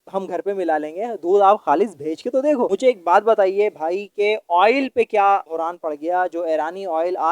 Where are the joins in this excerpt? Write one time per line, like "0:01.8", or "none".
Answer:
0:02.7